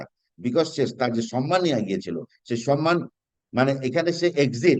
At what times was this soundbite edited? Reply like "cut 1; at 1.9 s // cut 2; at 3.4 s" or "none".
none